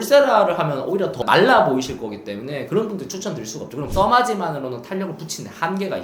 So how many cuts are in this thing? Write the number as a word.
two